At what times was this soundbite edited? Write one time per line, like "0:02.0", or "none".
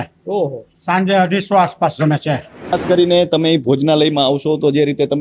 0:02.8